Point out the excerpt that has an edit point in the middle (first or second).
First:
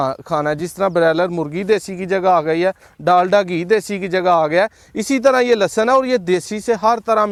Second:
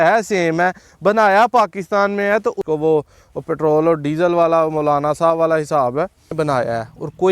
second